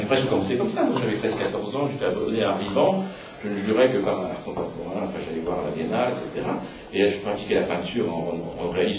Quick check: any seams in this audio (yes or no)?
no